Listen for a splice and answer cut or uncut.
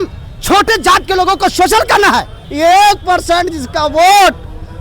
cut